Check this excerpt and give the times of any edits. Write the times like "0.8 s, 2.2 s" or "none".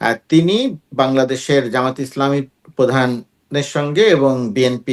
none